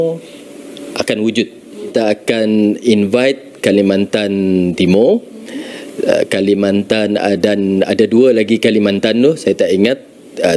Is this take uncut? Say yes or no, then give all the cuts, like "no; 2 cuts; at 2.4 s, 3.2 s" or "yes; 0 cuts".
no; 1 cut; at 1.9 s